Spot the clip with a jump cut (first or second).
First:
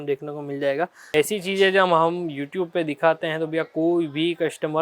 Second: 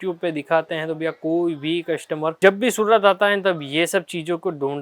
first